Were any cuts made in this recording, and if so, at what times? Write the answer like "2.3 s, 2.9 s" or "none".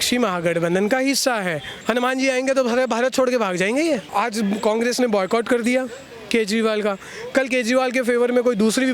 1.7 s, 4.1 s